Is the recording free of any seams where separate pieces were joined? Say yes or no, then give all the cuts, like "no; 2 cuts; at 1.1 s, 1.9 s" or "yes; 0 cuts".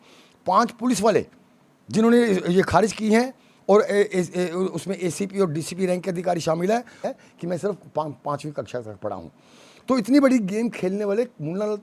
no; 1 cut; at 7.1 s